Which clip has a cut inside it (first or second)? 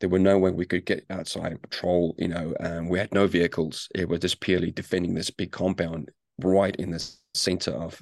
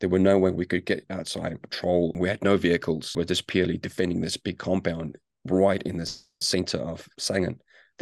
second